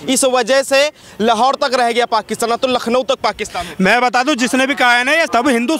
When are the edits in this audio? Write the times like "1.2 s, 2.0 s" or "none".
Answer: none